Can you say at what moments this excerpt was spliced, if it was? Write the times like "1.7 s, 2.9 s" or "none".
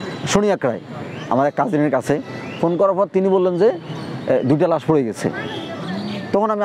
none